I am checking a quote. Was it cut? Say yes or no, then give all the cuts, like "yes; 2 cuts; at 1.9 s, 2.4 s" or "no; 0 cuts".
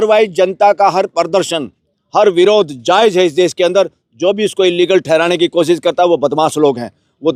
no; 0 cuts